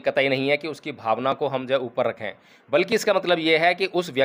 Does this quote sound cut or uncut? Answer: uncut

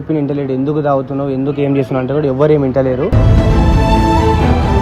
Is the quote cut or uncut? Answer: uncut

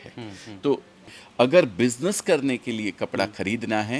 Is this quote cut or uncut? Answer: cut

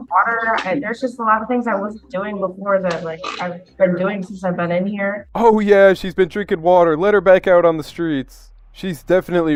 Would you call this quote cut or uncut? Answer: uncut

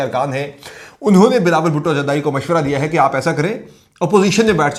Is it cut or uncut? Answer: uncut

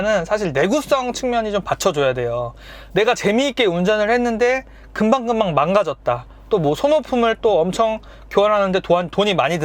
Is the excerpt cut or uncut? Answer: uncut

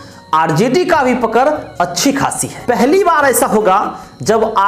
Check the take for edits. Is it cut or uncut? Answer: cut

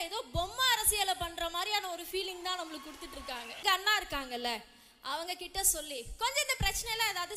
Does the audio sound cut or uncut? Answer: cut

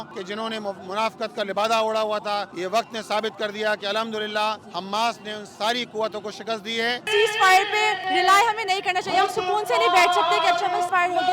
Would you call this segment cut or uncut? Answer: cut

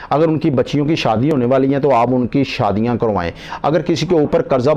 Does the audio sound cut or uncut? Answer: uncut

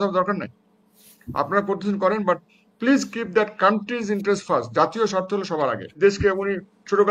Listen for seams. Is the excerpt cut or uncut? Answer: cut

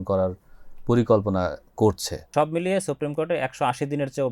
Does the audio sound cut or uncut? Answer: cut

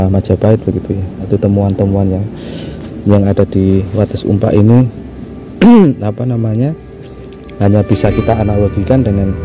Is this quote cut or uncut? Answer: cut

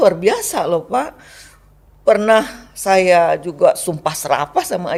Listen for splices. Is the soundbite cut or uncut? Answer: uncut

